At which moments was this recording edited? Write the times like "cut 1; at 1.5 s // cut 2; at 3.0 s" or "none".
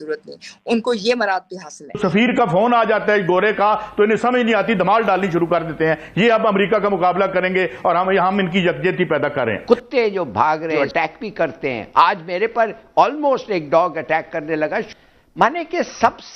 cut 1; at 2.0 s // cut 2; at 9.6 s // cut 3; at 10.7 s // cut 4; at 14.9 s